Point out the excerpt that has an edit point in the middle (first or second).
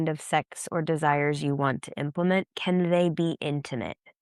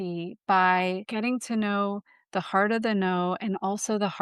second